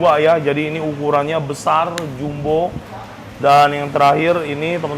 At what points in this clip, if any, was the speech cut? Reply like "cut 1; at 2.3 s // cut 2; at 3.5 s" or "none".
none